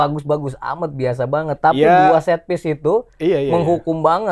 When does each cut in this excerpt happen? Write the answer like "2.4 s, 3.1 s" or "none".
none